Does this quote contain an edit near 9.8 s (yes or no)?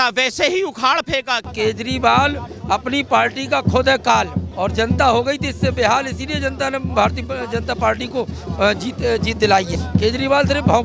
yes